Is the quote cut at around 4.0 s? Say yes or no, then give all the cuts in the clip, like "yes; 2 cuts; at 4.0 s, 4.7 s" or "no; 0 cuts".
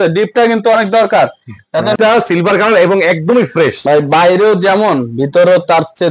no; 1 cut; at 1.9 s